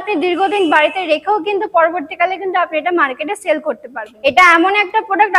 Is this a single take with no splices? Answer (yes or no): no